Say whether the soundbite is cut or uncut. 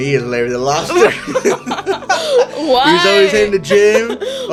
uncut